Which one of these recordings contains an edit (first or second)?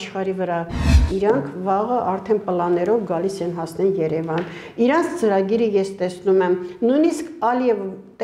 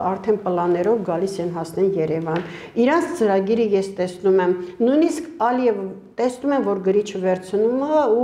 first